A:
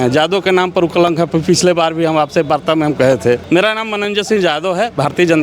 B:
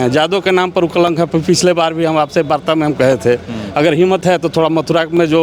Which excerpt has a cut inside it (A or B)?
A